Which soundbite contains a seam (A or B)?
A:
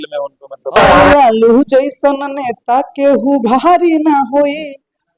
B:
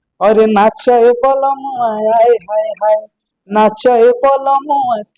A